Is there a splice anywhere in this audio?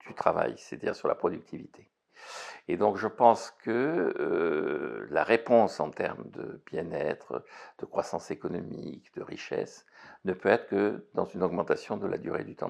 no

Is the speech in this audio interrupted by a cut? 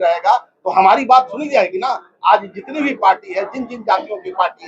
no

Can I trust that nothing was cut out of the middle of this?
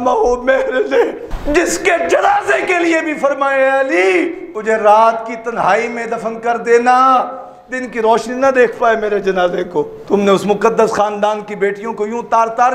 no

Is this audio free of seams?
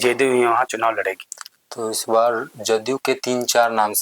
yes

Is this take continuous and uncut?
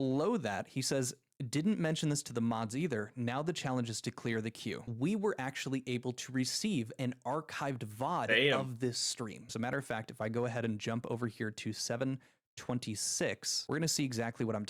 no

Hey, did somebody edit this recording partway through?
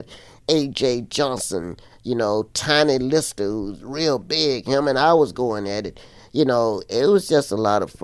no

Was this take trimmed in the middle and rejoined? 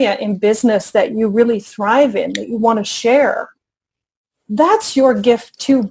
no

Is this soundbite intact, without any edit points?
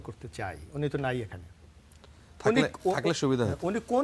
yes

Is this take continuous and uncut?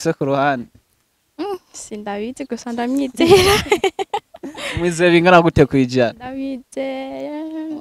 yes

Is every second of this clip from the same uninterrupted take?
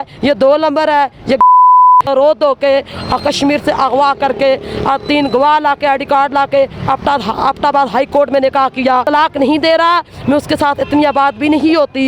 no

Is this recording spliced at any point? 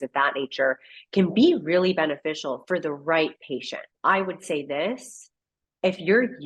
yes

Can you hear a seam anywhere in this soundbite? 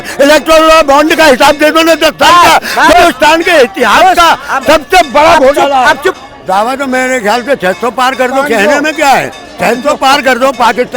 yes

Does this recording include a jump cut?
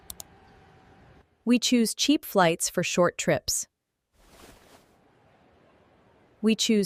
no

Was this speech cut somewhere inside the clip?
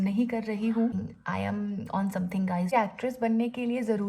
yes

